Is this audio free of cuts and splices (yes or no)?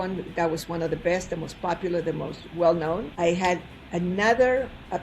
no